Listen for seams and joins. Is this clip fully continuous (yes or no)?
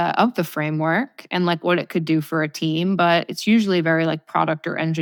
yes